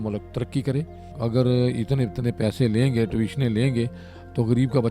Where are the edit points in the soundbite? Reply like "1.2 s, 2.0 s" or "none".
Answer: 1.1 s